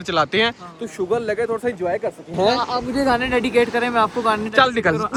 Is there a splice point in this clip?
no; 0 cuts

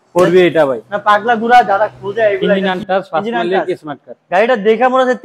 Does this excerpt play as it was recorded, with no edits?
no; 1 cut; at 2.6 s

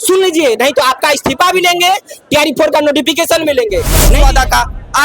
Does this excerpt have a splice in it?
yes; 1 cut; at 4.1 s

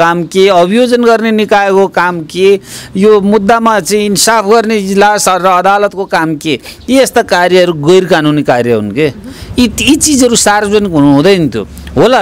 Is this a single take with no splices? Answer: yes; 0 cuts

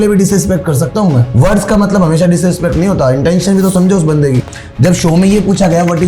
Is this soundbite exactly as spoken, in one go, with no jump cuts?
no; 1 cut; at 1.3 s

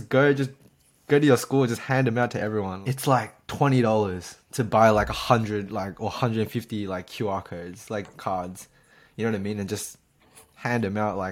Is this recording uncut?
no; 1 cut; at 2.8 s

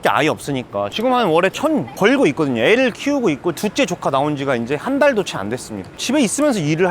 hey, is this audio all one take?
no; 2 cuts; at 0.9 s, 6.0 s

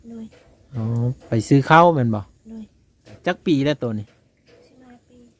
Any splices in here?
yes; 1 cut; at 3.0 s

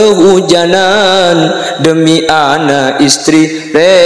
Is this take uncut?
yes; 0 cuts

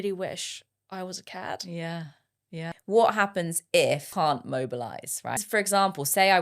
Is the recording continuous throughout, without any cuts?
no; 3 cuts; at 2.7 s, 4.1 s, 5.4 s

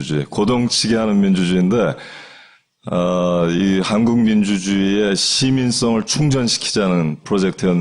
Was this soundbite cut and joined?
yes; 1 cut; at 6.6 s

